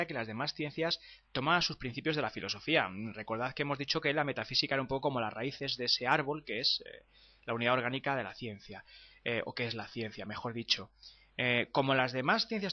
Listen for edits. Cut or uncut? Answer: uncut